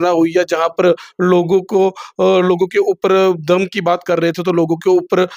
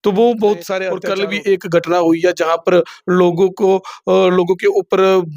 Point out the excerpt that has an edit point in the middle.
second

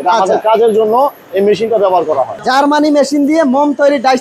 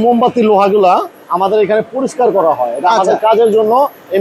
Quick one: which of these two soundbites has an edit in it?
first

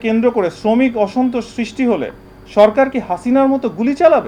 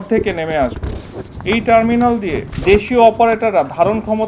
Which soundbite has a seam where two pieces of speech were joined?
second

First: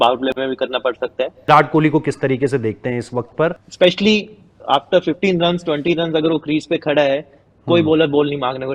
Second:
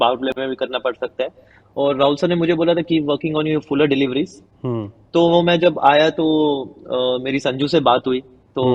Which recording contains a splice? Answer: first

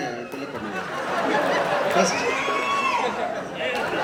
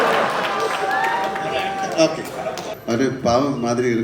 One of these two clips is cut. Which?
second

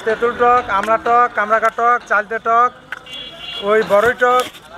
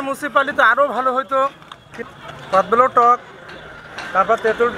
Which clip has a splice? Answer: second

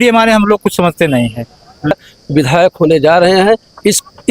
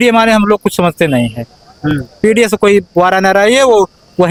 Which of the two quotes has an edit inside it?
first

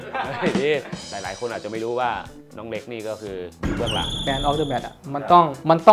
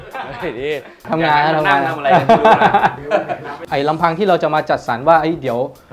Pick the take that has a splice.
first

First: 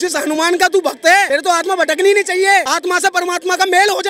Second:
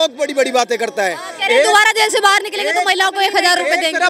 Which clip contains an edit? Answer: first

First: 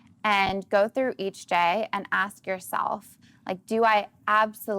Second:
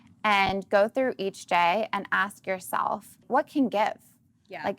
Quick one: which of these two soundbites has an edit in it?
second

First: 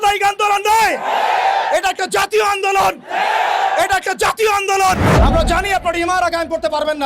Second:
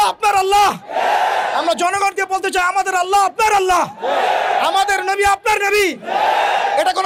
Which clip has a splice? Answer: first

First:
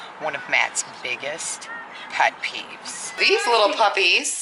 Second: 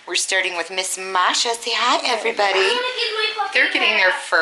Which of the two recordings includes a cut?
first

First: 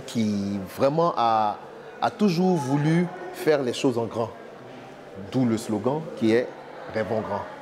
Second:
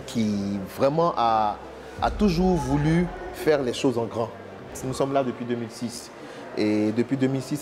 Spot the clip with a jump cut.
second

